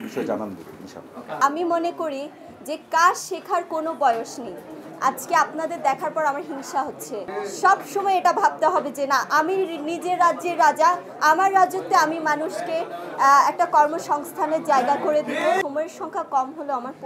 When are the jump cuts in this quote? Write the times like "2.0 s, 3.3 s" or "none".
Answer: 1.3 s, 7.3 s, 15.4 s